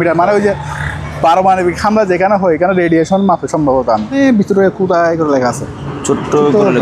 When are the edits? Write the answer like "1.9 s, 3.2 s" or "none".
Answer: 4.2 s